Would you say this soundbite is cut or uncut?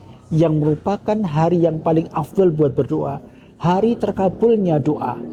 uncut